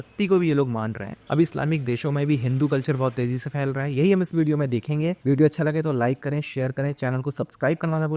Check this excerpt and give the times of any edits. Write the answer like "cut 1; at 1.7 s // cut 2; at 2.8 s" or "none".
none